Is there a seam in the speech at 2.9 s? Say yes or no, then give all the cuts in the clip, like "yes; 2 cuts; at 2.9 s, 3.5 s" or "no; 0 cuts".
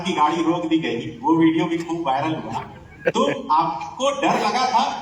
no; 0 cuts